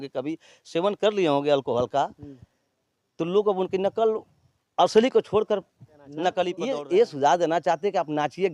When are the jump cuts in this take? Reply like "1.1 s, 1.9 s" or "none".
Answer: 6.6 s

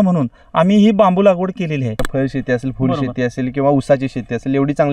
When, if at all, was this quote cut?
2.0 s

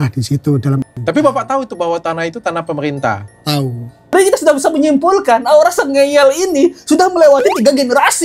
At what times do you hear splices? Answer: 0.9 s, 4.1 s

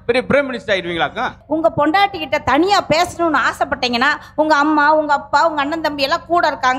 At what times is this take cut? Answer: 1.4 s

